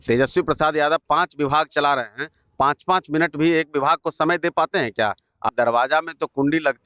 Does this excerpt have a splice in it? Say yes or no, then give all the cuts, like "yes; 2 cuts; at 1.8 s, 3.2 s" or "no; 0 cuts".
yes; 1 cut; at 5.5 s